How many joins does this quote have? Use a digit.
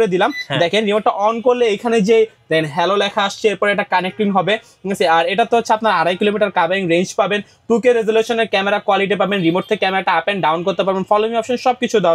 0